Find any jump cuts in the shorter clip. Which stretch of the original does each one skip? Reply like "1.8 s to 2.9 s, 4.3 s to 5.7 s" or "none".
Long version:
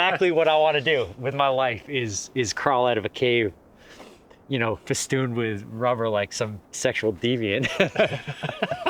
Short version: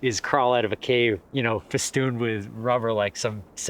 3.6 s to 4.4 s